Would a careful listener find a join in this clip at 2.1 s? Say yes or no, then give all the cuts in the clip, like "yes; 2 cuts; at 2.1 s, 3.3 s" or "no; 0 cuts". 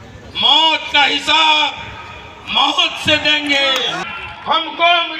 no; 1 cut; at 4.0 s